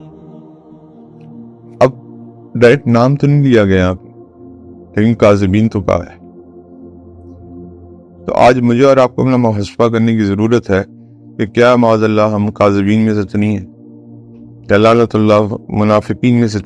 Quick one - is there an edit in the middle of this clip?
no; 0 cuts

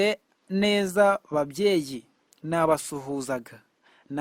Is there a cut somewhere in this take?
no; 0 cuts

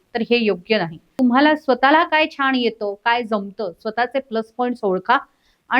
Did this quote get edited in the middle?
yes; 1 cut; at 1.1 s

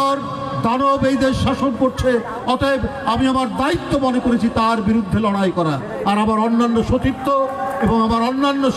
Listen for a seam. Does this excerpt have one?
no; 0 cuts

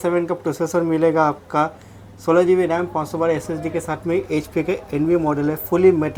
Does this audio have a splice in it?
no; 0 cuts

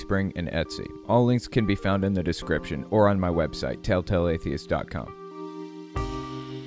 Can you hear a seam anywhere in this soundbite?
yes; 1 cut; at 5.2 s

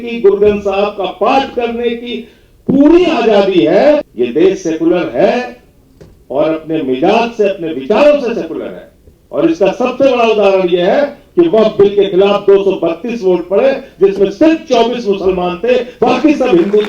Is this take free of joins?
no; 1 cut; at 4.1 s

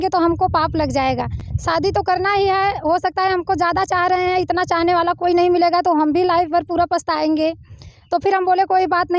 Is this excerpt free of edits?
yes; 0 cuts

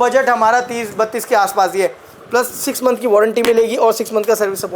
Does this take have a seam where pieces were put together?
yes; 1 cut; at 2.1 s

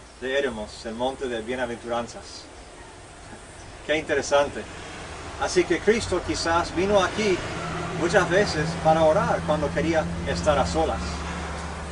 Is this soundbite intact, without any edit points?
no; 1 cut; at 9.4 s

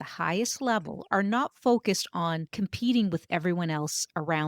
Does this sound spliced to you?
yes; 1 cut; at 2.5 s

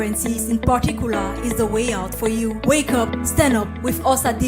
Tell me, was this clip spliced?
yes; 1 cut; at 3.5 s

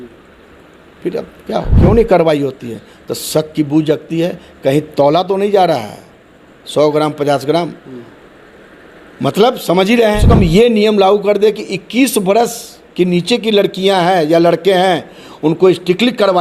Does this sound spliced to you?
yes; 2 cuts; at 1.7 s, 10.2 s

